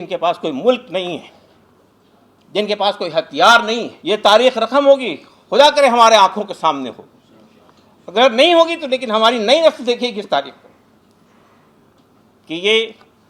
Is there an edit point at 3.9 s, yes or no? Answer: yes